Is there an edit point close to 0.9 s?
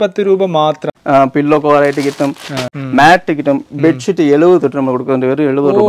yes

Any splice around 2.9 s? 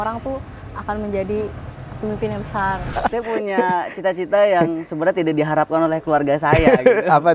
yes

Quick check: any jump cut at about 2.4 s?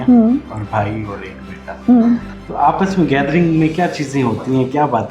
yes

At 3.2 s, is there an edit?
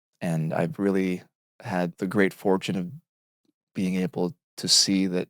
no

